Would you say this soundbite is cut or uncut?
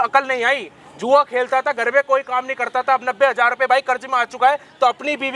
uncut